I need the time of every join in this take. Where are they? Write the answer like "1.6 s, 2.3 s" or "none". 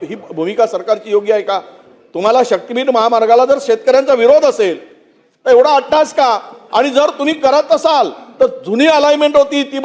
none